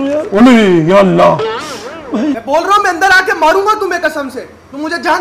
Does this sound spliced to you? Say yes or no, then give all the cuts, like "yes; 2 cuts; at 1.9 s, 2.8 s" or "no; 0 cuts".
yes; 1 cut; at 2.4 s